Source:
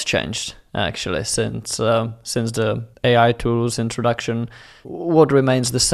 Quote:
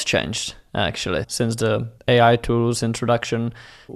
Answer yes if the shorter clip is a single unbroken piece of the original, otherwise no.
no